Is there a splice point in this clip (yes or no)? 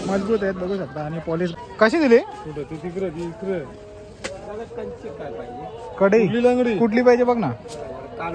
yes